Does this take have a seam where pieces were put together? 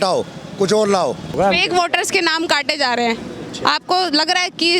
yes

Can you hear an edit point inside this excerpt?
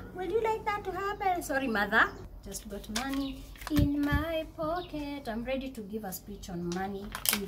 yes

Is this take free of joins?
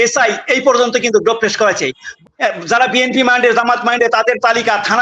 no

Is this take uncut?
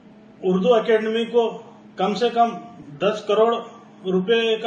yes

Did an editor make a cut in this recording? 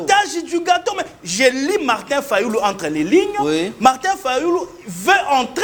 no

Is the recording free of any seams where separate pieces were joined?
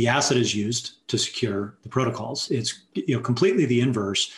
no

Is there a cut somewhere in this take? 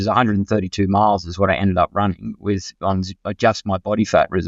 no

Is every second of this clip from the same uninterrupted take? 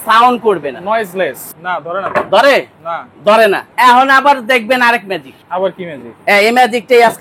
no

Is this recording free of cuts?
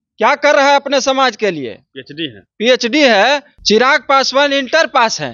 no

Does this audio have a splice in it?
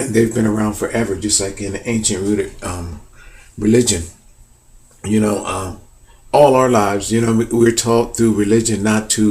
yes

